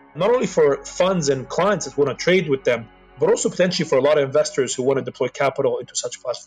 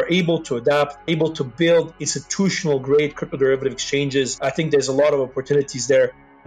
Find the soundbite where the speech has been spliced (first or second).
second